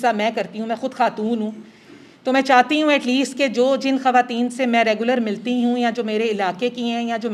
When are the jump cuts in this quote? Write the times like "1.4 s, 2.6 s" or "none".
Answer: none